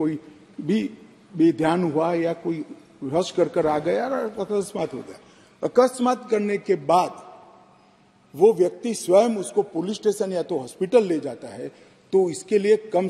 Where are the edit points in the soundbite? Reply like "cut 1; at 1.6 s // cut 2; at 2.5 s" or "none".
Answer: none